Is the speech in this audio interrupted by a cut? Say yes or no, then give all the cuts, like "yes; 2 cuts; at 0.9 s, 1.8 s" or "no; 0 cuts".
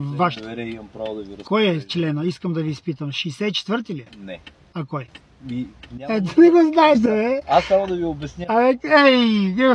no; 0 cuts